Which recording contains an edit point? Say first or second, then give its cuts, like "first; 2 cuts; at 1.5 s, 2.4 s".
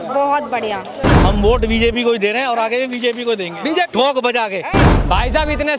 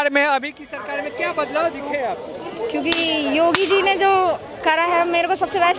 first; 2 cuts; at 1.1 s, 4.8 s